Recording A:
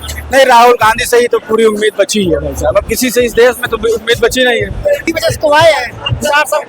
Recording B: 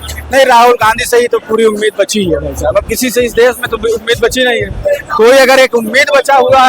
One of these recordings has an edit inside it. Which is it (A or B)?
A